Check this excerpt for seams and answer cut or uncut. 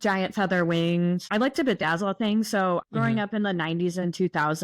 cut